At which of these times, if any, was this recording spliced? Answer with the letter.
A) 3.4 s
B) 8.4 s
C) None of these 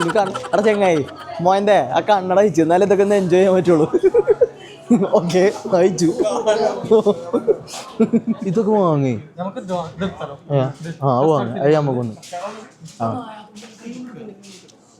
B